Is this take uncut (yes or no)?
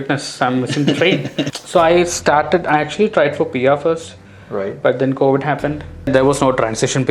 no